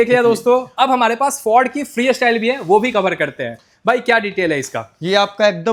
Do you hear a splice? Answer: no; 0 cuts

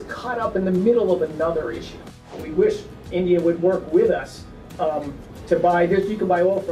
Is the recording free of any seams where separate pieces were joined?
no; 1 cut; at 2.4 s

